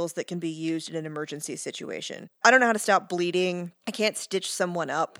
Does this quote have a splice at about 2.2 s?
yes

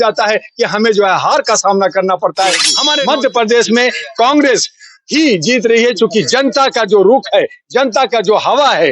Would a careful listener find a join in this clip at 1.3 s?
no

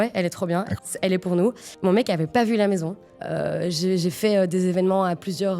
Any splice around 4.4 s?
no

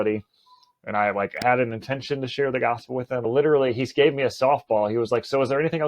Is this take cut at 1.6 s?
no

